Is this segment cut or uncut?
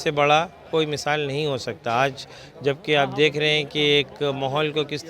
uncut